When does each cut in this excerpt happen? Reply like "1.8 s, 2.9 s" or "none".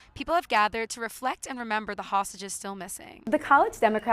3.2 s